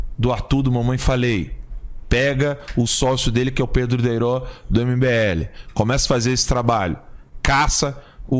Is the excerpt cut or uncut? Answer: cut